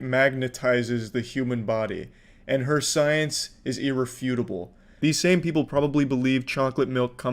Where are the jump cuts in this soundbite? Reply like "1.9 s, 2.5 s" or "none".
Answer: 5.0 s